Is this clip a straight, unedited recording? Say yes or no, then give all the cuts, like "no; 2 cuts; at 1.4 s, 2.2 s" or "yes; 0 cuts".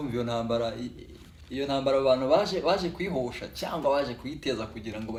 yes; 0 cuts